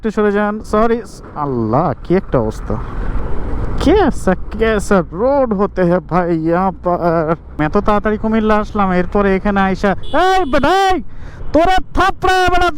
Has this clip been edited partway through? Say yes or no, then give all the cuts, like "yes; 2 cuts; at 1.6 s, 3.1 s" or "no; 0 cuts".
yes; 2 cuts; at 3.2 s, 7.6 s